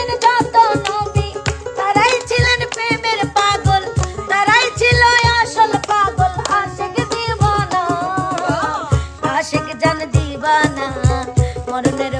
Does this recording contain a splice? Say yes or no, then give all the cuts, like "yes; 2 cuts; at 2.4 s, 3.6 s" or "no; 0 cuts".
no; 0 cuts